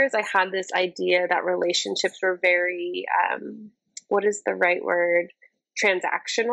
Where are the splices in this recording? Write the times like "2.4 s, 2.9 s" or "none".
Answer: none